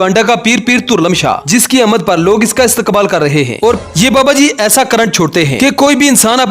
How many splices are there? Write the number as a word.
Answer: one